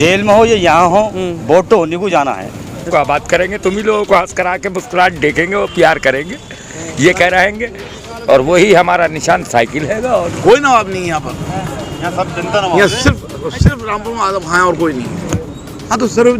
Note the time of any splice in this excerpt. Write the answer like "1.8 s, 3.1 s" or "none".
2.9 s, 10.3 s, 15.3 s